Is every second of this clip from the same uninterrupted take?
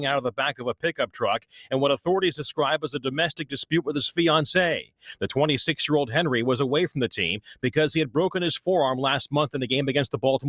yes; 0 cuts

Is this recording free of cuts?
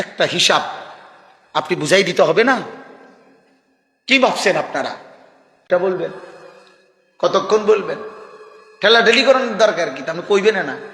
no; 1 cut; at 5.7 s

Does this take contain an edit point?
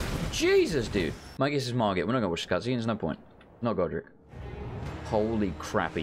yes; 1 cut; at 1.2 s

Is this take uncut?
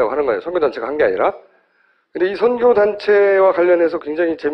no; 1 cut; at 2.2 s

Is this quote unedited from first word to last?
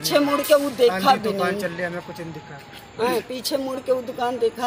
yes; 0 cuts

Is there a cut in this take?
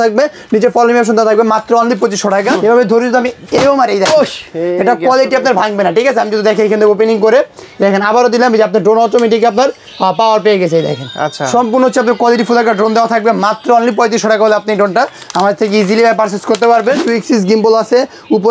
yes; 2 cuts; at 2.5 s, 17.0 s

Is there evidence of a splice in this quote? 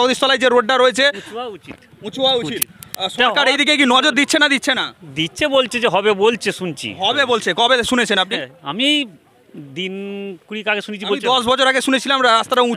no; 0 cuts

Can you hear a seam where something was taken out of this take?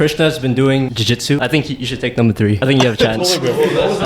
yes; 2 cuts; at 1.2 s, 2.6 s

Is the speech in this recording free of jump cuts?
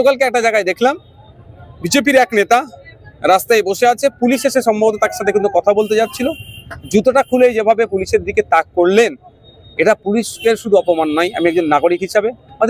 yes; 0 cuts

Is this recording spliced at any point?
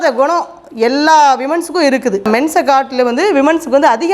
yes; 1 cut; at 2.3 s

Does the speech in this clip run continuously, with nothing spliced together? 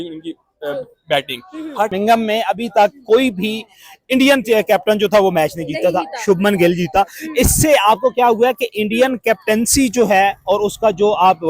no; 1 cut; at 1.9 s

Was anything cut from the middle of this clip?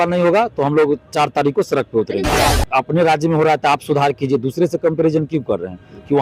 yes; 1 cut; at 2.5 s

